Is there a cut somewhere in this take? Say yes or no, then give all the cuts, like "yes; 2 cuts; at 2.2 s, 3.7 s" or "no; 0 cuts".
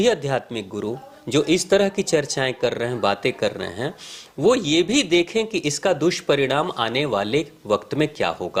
no; 0 cuts